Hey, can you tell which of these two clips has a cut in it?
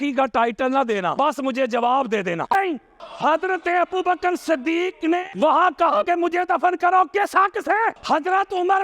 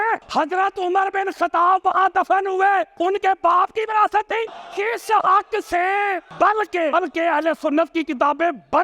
first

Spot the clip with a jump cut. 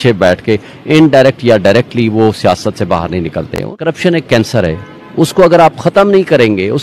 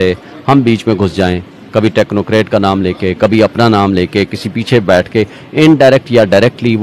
first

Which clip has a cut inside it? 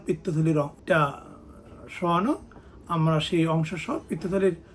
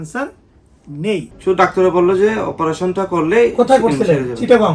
second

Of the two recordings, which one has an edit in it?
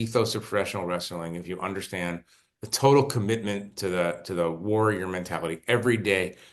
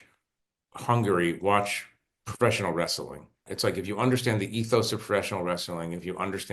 second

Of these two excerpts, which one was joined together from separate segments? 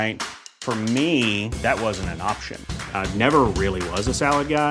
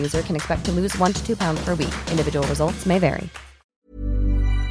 second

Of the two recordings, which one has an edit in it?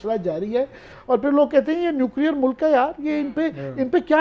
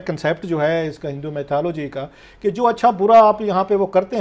first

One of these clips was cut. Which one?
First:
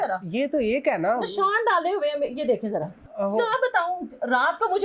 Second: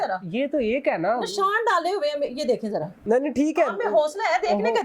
first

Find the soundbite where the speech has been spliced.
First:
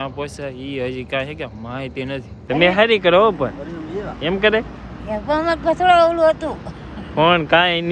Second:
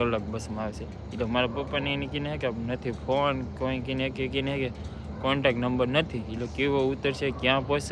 first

